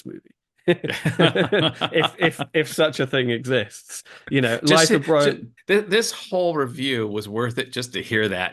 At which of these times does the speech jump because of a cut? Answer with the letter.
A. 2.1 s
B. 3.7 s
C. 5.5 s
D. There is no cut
C